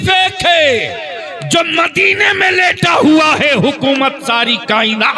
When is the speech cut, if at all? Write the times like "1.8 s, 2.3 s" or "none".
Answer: none